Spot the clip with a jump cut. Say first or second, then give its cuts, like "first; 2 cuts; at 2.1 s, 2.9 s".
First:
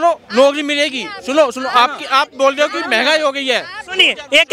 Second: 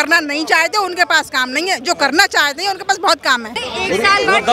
second; 1 cut; at 3.6 s